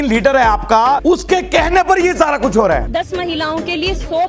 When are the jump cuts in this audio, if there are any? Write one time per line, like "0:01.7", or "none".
0:01.0
0:02.9